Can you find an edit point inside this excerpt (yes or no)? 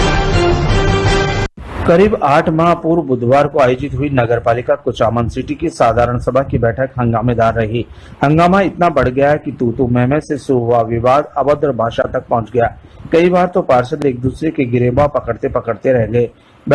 yes